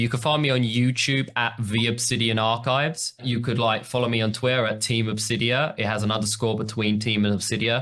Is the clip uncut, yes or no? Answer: no